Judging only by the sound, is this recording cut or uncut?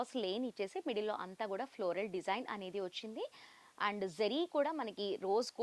uncut